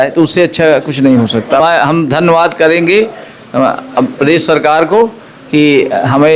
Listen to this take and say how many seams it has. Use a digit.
1